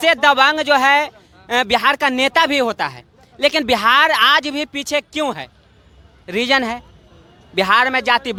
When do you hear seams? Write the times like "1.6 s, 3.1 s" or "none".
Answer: none